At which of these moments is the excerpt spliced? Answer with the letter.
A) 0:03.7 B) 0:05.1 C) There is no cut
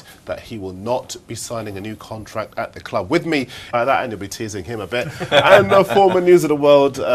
C